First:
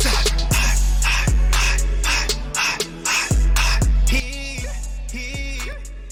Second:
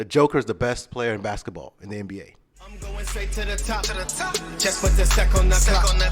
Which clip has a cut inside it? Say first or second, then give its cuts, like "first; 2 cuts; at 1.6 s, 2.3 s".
second; 1 cut; at 2.7 s